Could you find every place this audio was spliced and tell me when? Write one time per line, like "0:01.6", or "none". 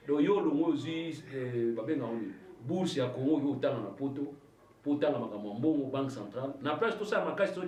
none